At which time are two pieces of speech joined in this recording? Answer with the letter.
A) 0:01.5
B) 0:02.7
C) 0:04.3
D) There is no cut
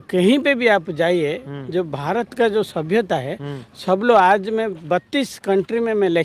D